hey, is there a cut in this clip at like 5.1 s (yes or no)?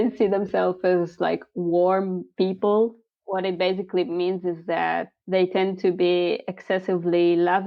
yes